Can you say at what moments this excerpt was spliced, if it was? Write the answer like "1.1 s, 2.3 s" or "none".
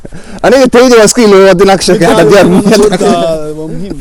none